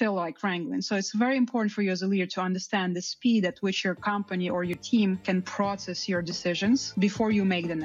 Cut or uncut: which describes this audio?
cut